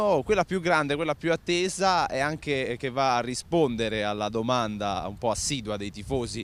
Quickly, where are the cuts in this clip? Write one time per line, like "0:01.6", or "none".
none

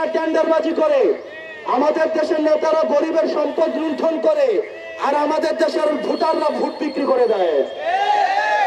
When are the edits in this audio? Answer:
none

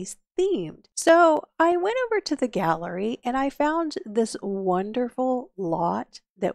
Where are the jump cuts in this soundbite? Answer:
0:01.1

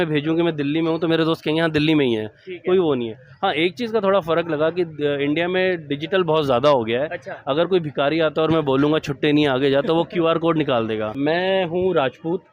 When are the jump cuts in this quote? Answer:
0:11.2

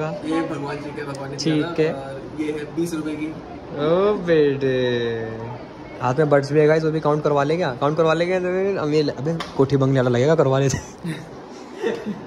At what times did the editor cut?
none

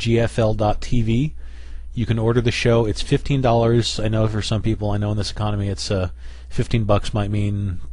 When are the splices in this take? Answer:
0:04.9

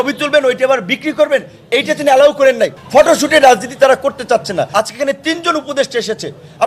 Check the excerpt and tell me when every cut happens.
0:02.8
0:04.7

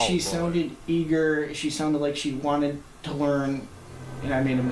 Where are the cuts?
none

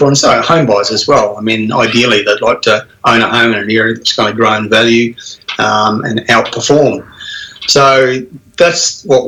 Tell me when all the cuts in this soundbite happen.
none

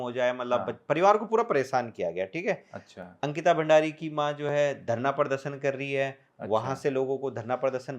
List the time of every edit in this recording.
none

